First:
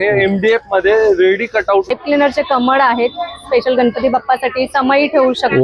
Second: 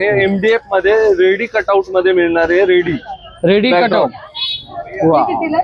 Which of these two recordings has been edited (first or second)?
first